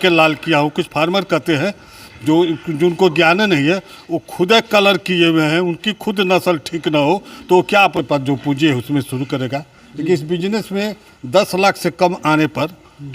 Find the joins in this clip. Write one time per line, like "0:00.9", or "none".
0:07.9